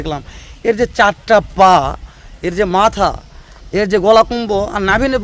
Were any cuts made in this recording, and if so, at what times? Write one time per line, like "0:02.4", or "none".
none